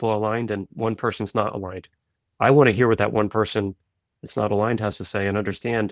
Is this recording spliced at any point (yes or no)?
no